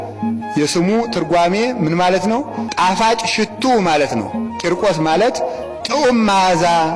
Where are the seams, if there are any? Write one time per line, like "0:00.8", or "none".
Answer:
0:02.7